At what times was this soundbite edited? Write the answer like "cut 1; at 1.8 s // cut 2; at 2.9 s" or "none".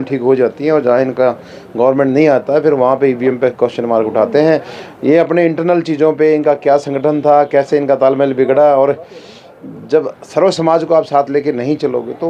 none